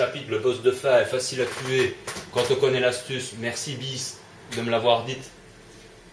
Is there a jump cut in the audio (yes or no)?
yes